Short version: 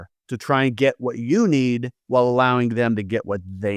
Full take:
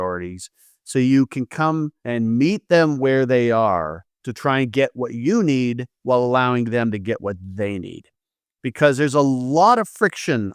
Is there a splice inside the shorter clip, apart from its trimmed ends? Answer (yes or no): no